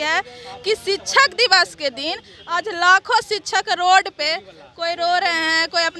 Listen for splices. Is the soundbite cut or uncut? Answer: uncut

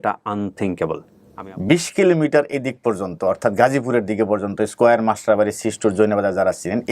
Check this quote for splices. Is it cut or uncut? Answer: cut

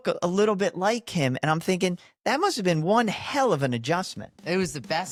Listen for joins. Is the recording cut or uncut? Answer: uncut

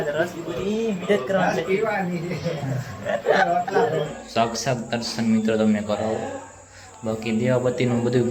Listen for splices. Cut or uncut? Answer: cut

